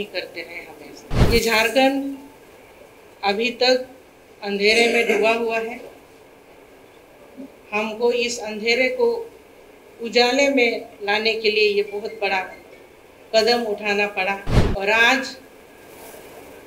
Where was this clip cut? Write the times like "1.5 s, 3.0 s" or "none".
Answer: 1.2 s, 14.6 s

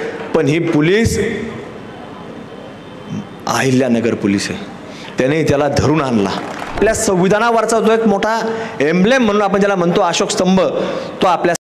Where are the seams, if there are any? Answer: 6.7 s

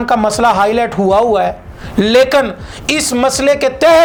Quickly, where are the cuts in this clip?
none

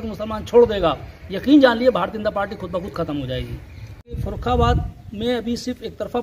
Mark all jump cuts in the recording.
4.1 s

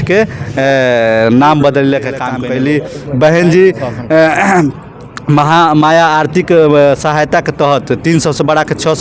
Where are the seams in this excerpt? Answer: 2.3 s

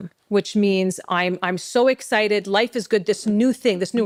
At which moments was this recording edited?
none

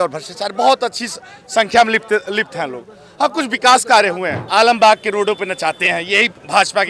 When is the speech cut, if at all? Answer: 4.3 s

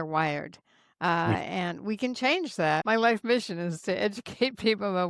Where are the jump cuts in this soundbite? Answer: 2.8 s

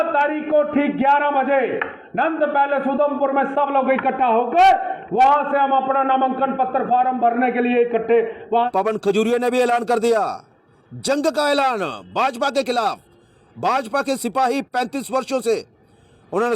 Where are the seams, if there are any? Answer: 8.7 s

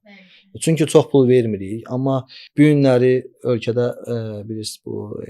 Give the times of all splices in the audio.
2.4 s

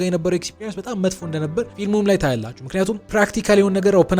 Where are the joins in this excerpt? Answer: 1.7 s, 3.0 s

